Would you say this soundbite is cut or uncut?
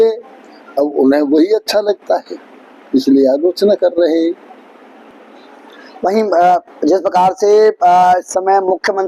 uncut